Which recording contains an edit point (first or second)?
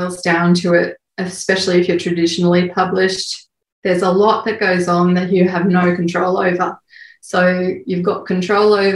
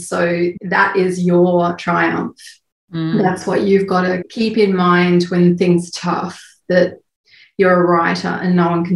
second